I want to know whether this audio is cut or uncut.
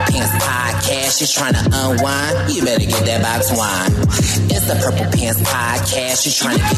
uncut